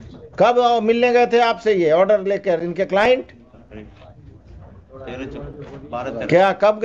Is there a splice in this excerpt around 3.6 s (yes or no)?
yes